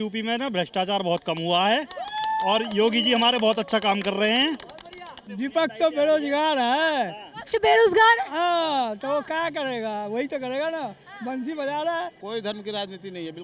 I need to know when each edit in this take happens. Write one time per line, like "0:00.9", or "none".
0:05.2
0:12.2